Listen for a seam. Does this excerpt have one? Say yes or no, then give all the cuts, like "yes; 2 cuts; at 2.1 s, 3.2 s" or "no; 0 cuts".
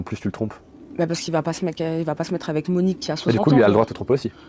no; 0 cuts